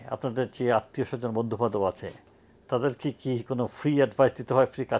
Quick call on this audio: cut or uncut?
uncut